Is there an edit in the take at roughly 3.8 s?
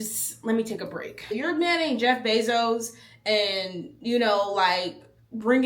no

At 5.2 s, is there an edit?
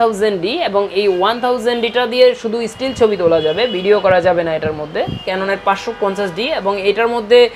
yes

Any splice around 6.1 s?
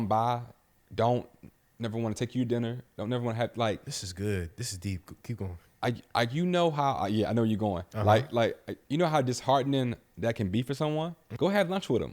no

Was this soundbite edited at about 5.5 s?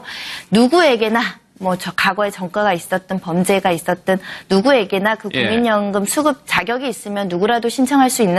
no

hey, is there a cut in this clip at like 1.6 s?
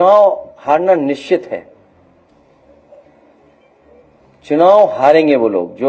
no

